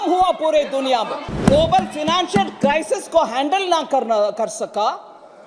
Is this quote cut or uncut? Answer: cut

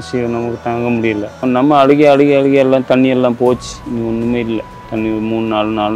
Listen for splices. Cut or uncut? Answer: cut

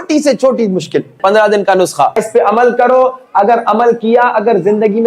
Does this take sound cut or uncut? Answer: cut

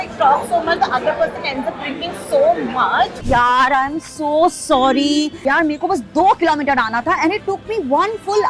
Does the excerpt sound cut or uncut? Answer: cut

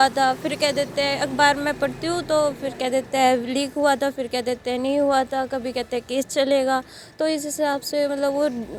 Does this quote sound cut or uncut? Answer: uncut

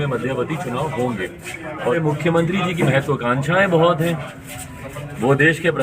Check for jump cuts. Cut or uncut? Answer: cut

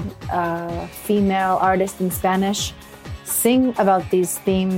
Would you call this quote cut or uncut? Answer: uncut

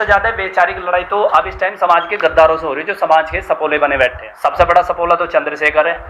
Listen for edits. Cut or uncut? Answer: cut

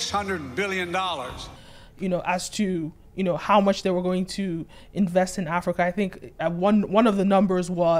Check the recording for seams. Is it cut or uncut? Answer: uncut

